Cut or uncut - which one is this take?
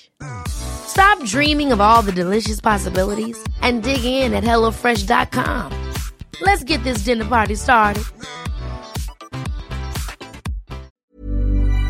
cut